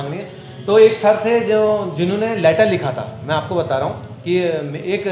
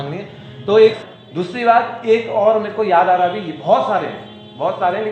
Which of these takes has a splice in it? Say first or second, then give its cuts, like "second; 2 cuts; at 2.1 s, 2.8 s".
second; 1 cut; at 1.0 s